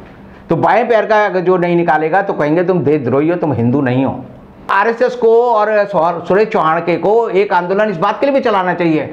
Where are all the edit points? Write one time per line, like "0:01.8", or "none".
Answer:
0:04.7